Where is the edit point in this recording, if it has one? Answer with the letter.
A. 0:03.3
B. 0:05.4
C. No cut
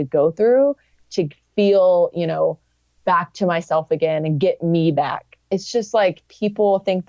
B